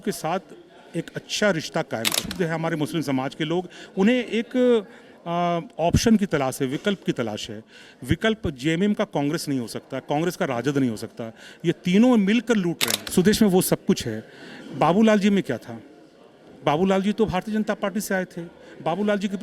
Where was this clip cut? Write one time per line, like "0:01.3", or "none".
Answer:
0:02.2
0:12.9